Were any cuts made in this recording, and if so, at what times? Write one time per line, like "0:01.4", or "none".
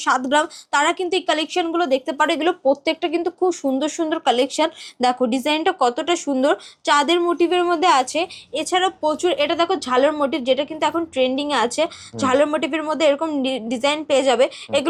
none